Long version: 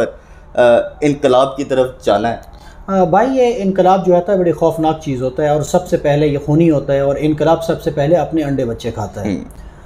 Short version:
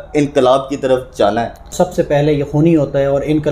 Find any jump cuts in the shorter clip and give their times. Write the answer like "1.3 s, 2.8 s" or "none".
1.7 s